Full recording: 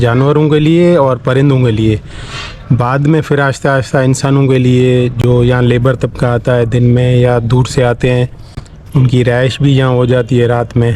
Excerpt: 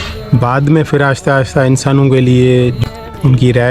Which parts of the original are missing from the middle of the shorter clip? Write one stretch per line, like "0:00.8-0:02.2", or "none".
0:05.2-0:08.5